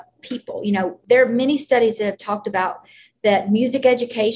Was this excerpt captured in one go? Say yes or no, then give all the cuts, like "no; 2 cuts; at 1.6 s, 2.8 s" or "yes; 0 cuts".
no; 1 cut; at 1.0 s